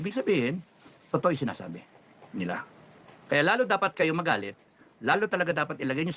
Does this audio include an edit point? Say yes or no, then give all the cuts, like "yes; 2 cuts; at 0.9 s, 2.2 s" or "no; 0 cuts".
no; 0 cuts